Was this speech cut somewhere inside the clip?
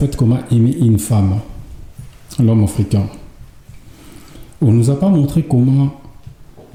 no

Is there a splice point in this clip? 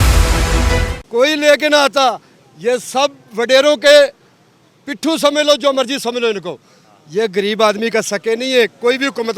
no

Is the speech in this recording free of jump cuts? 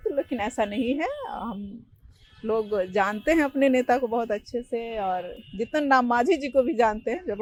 yes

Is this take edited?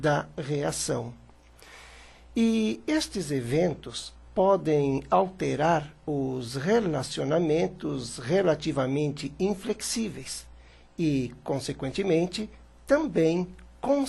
yes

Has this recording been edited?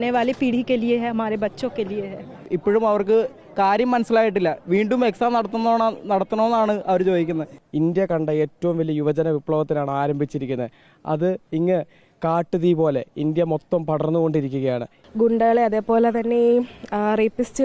yes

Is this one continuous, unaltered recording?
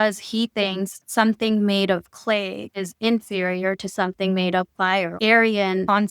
no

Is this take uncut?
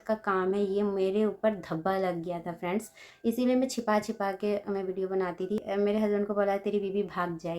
no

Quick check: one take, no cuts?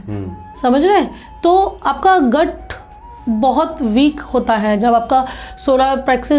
yes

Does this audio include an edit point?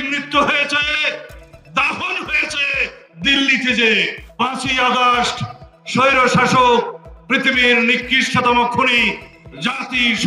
yes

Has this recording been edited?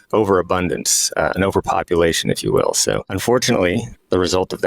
yes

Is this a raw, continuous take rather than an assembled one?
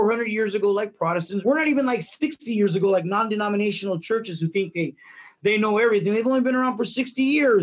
no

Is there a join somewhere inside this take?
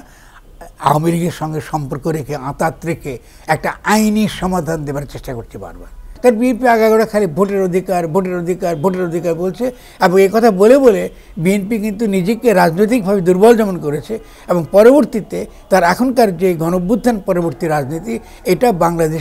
yes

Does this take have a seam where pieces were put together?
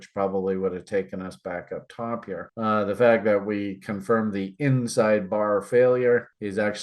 no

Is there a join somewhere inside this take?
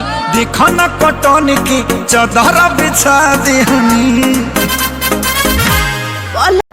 no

